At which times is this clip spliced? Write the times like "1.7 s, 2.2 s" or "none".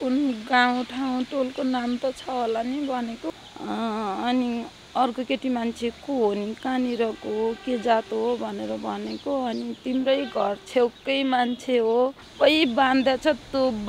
3.4 s, 12.2 s